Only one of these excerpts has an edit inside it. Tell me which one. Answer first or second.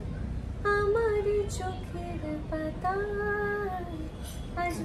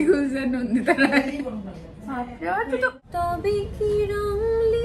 second